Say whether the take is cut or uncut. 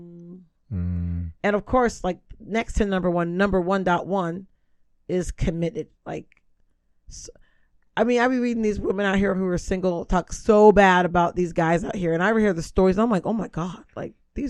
uncut